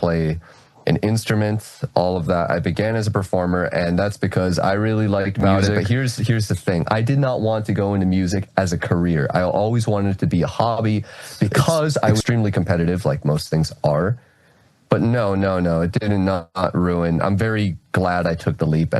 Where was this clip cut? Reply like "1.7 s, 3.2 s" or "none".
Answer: 5.8 s, 12.2 s